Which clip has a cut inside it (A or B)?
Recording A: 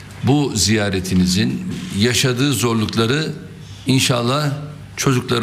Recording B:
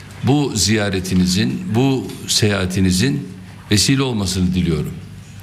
B